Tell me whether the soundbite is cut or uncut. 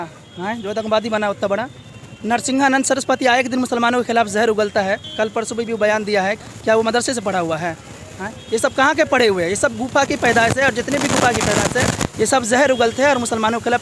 uncut